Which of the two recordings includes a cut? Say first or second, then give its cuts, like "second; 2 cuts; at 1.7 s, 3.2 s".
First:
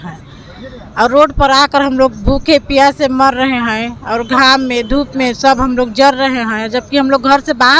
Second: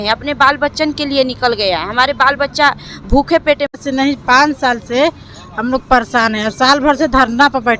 second; 1 cut; at 3.7 s